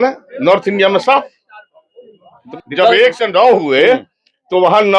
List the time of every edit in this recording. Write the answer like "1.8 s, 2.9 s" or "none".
2.4 s